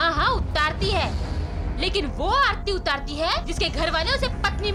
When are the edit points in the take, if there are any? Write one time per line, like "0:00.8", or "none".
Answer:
none